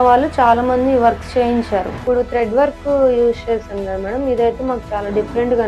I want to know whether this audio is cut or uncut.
cut